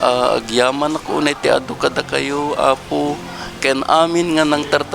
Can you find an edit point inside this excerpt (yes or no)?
no